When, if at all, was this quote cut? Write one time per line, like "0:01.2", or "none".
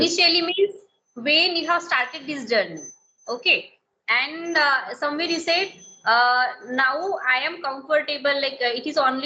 none

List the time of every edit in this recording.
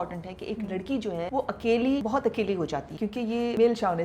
0:01.3
0:02.0
0:03.2

